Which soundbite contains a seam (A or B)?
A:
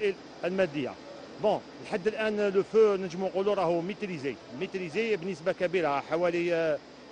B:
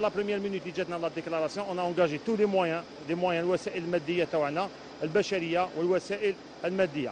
B